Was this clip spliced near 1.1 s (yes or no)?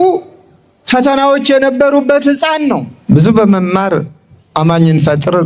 no